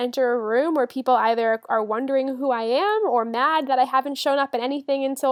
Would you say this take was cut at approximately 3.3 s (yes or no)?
no